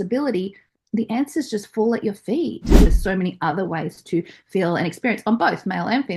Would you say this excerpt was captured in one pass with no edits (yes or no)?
no